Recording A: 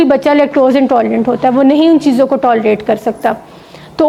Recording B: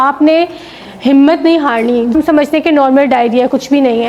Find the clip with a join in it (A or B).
B